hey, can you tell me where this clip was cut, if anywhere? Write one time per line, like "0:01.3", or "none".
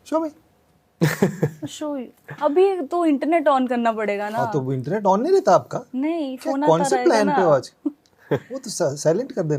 none